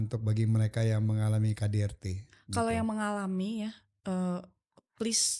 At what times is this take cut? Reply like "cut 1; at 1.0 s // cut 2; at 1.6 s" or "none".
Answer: none